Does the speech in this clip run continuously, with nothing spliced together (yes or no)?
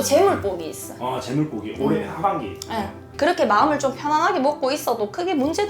no